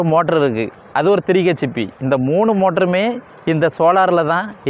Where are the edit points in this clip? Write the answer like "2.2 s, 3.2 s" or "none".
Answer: none